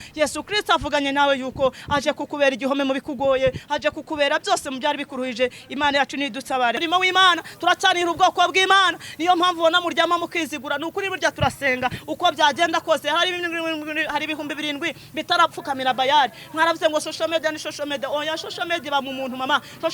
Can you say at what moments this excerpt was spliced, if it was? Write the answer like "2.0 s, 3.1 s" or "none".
6.8 s